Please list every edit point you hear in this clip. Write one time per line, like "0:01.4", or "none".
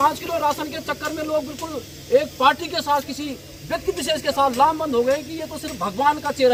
none